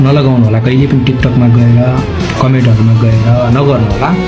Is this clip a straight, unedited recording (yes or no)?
yes